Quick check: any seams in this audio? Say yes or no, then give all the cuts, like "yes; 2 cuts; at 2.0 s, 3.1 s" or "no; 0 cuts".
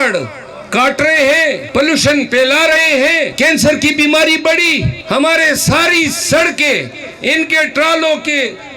yes; 3 cuts; at 1.6 s, 3.3 s, 5.0 s